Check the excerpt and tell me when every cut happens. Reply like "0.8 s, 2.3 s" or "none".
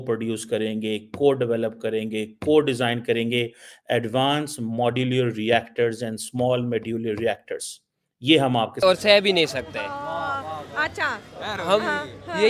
8.8 s